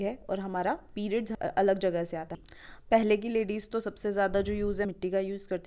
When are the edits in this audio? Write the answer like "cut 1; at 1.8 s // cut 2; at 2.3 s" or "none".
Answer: cut 1; at 1.3 s // cut 2; at 2.3 s // cut 3; at 4.9 s